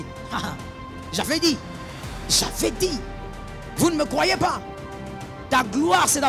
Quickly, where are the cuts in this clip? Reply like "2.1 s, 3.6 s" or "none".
none

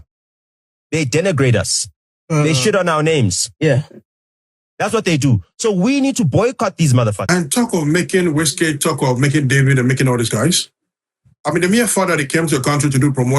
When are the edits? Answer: 7.2 s

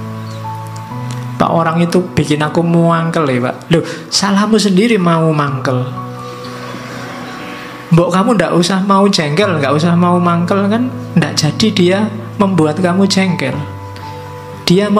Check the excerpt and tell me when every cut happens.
1.3 s

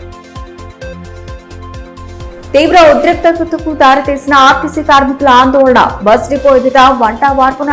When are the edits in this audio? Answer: none

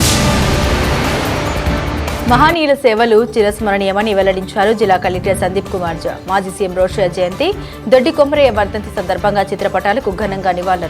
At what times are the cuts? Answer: 2.1 s

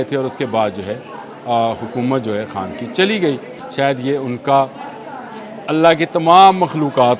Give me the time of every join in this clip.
3.6 s

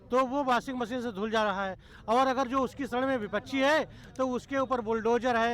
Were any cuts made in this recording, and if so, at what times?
none

